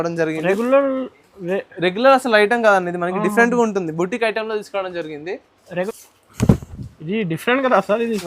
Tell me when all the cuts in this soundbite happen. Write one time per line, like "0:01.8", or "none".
0:05.9